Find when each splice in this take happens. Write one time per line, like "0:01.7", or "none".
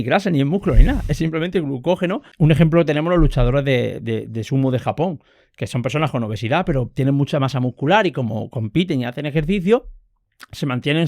0:02.3